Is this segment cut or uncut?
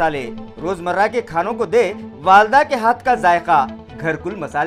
uncut